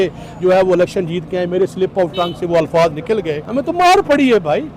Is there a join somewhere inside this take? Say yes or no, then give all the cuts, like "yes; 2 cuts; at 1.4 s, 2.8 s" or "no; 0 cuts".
yes; 1 cut; at 3.4 s